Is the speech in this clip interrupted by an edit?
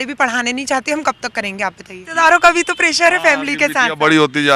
yes; 1 cut; at 1.9 s

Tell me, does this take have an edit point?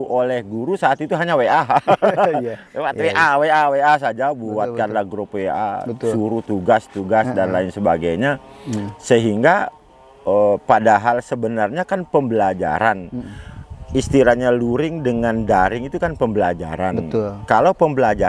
no; 0 cuts

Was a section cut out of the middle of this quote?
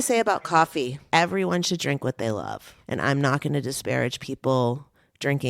yes; 2 cuts; at 1.0 s, 2.7 s

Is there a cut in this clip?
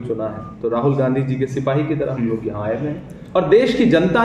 yes; 1 cut; at 3.2 s

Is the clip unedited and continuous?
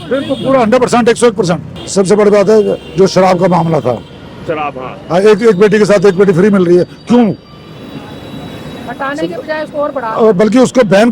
no; 1 cut; at 1.7 s

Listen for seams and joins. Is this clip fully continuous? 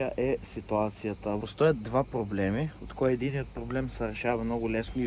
yes; 0 cuts

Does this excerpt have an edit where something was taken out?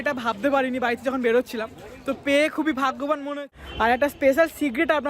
yes; 1 cut; at 3.3 s

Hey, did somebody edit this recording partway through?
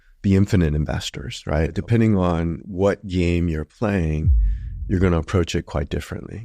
yes; 1 cut; at 1.8 s

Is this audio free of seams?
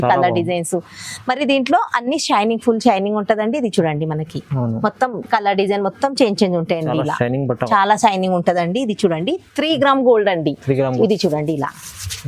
no; 1 cut; at 10.9 s

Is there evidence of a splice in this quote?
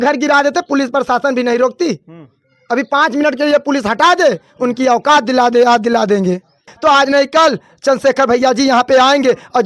yes; 1 cut; at 6.7 s

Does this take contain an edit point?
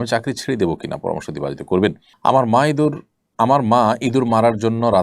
yes; 1 cut; at 2.1 s

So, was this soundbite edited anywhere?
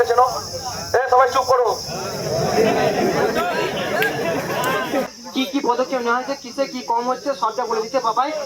yes; 1 cut; at 5.1 s

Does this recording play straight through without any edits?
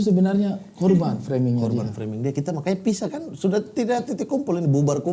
yes; 0 cuts

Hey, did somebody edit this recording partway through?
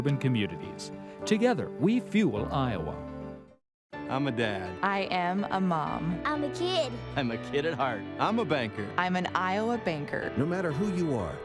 no; 0 cuts

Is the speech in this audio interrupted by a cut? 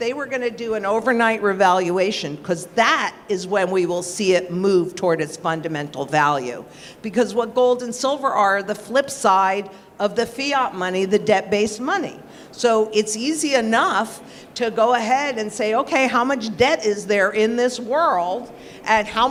no; 0 cuts

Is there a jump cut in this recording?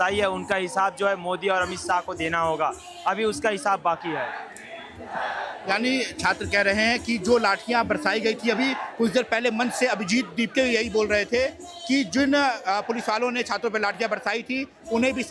no; 0 cuts

